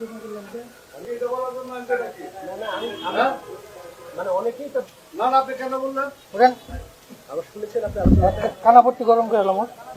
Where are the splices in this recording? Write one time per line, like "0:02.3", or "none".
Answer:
0:01.1
0:06.2

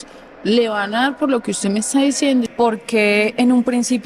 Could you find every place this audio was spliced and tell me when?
0:02.5

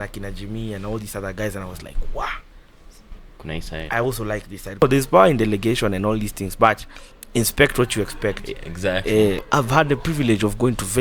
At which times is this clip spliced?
0:04.8
0:09.4

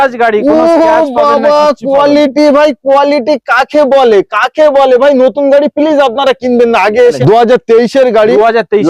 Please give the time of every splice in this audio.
0:07.2

